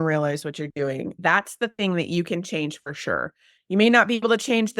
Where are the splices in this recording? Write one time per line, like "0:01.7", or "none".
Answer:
0:01.2
0:03.5